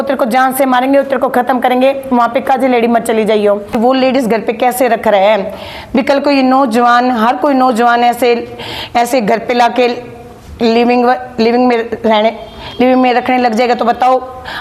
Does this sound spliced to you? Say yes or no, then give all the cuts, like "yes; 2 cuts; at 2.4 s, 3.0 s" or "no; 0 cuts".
yes; 1 cut; at 3.8 s